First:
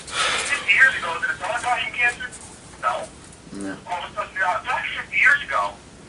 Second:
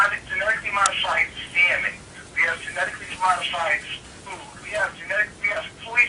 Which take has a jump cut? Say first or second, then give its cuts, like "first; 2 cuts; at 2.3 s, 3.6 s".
first; 1 cut; at 4.1 s